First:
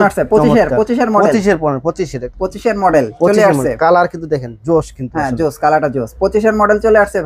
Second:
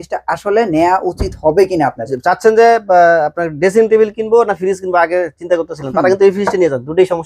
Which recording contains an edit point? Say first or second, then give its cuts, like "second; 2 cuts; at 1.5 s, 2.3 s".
second; 1 cut; at 2.1 s